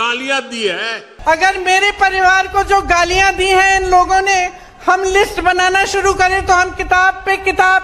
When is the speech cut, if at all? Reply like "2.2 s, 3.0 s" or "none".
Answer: 1.0 s